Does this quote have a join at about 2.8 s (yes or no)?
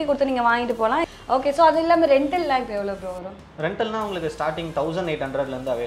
no